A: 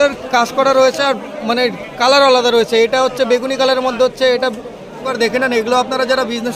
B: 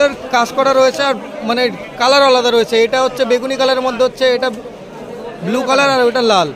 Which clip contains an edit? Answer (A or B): A